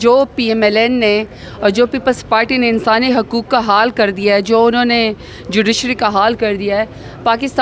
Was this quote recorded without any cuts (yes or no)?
yes